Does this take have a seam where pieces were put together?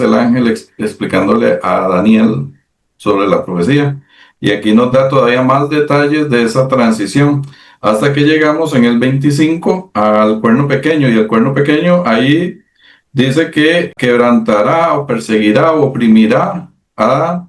yes; 1 cut; at 13.9 s

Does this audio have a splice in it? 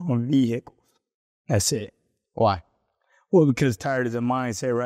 no; 0 cuts

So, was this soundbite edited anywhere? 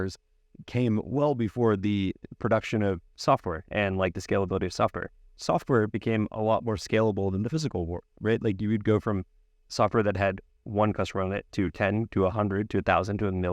yes; 2 cuts; at 5.3 s, 8.1 s

